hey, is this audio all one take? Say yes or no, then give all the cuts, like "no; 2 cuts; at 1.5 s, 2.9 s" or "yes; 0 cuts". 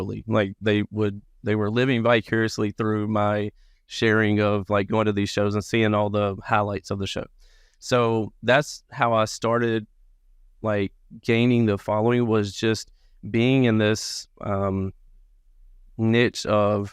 yes; 0 cuts